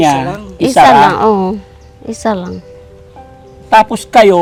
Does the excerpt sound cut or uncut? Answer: uncut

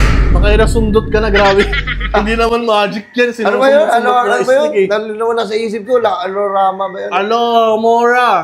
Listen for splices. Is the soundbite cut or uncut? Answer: uncut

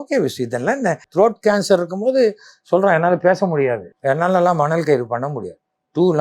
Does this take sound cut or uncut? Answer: cut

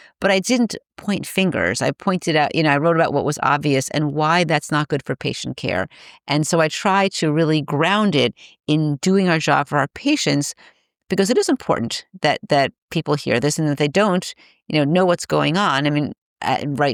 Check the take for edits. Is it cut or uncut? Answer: uncut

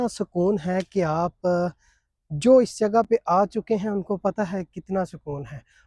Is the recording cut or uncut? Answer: uncut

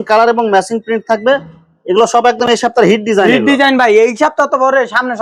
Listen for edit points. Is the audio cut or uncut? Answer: uncut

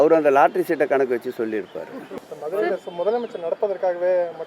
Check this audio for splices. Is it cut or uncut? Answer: cut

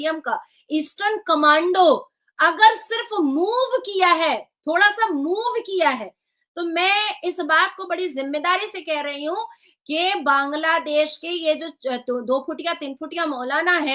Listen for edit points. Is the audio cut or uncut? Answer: uncut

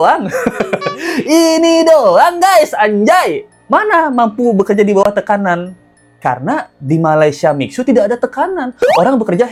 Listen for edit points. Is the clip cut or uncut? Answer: uncut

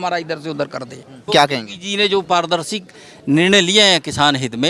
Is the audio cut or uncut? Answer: cut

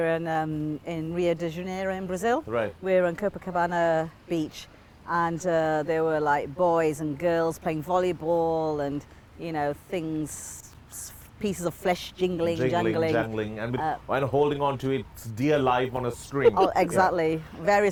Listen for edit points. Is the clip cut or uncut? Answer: uncut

